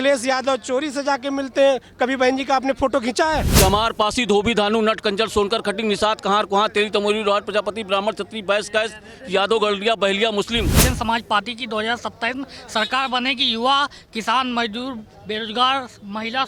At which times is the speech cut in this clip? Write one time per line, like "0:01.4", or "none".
0:03.5
0:10.8